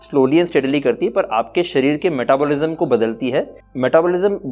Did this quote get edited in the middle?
yes; 1 cut; at 3.6 s

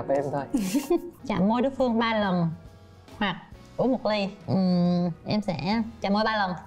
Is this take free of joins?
no; 1 cut; at 1.1 s

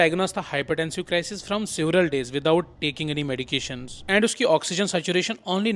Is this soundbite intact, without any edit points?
yes; 0 cuts

